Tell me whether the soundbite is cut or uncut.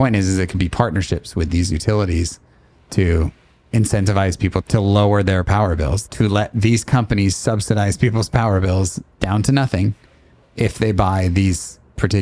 cut